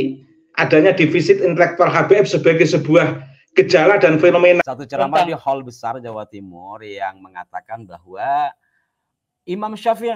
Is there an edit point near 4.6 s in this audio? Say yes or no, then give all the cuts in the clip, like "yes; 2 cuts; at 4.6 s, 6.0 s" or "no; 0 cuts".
yes; 1 cut; at 4.6 s